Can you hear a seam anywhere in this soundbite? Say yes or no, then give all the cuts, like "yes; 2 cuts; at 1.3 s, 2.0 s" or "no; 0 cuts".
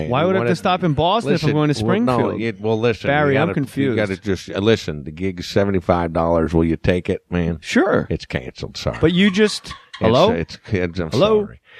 no; 0 cuts